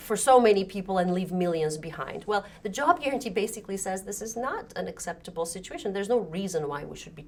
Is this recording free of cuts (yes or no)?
yes